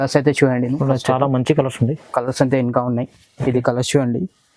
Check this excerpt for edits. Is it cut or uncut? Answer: uncut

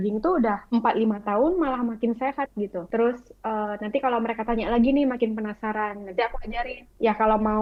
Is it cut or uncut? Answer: uncut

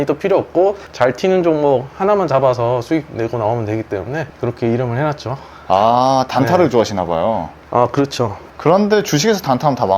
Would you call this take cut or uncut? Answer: uncut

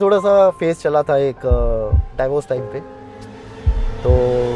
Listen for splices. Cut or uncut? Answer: uncut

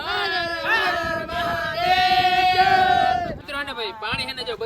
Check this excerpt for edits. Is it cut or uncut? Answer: cut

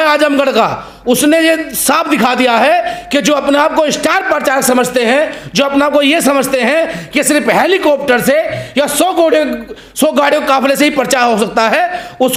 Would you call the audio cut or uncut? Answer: uncut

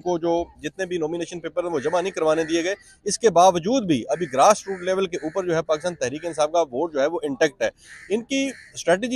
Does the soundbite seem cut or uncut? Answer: uncut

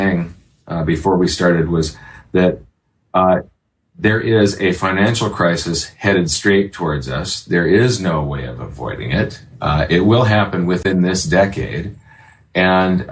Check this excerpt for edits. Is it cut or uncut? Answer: cut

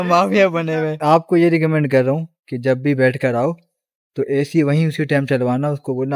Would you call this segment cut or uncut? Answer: cut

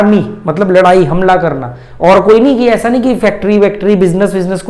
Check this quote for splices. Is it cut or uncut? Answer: uncut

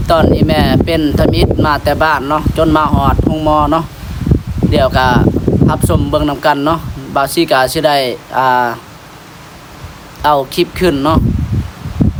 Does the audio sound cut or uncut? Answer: uncut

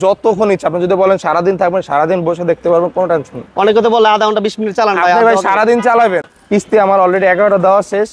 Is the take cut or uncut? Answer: cut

